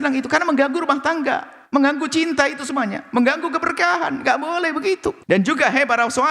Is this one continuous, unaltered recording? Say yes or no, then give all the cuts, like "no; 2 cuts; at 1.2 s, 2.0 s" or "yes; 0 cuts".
no; 1 cut; at 5.2 s